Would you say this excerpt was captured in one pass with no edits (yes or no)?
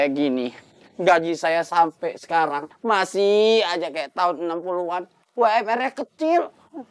yes